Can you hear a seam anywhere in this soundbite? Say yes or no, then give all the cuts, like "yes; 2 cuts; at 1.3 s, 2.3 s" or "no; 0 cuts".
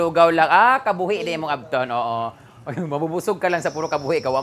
no; 0 cuts